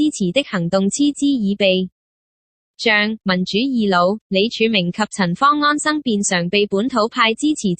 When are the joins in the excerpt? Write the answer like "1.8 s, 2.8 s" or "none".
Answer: 4.0 s